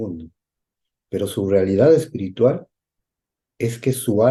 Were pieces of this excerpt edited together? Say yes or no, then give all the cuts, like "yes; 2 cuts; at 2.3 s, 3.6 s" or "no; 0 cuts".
no; 0 cuts